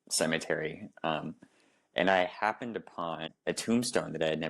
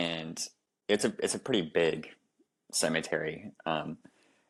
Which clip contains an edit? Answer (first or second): first